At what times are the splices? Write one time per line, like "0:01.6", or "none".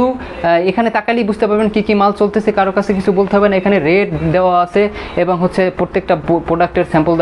none